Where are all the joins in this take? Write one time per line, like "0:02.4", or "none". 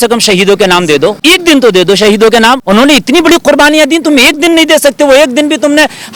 0:01.2
0:02.6